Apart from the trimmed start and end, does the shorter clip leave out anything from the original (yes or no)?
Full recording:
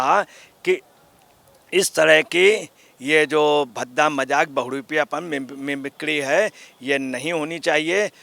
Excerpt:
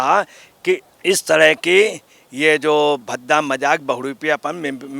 yes